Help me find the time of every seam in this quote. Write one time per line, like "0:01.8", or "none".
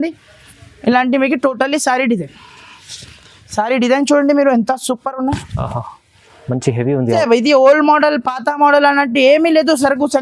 0:07.2

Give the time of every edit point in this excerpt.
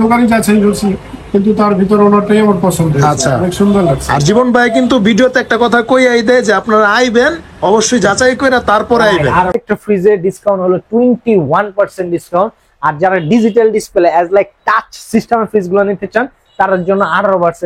0:09.5

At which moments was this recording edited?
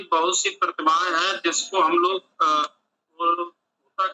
none

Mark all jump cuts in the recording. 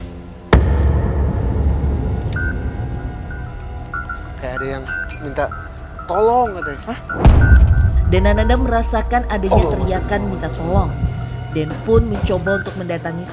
none

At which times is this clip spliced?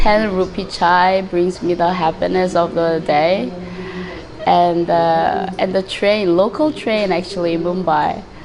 none

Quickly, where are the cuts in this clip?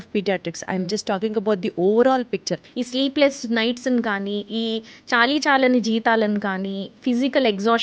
0:02.6

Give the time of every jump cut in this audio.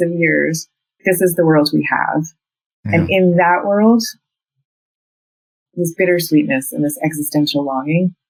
none

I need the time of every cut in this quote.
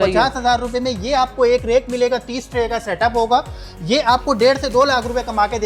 none

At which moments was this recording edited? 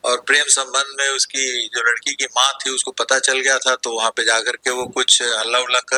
none

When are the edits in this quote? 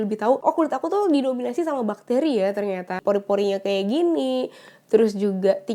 0:03.0

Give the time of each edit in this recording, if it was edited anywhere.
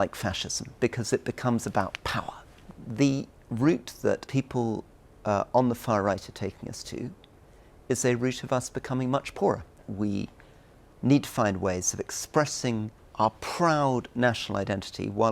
0:02.7
0:04.2
0:09.8
0:13.0

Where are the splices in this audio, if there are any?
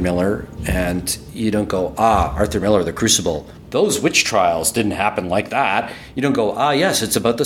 0:03.5

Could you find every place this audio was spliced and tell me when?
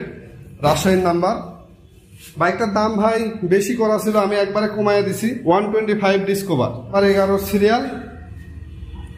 0:05.4
0:06.9

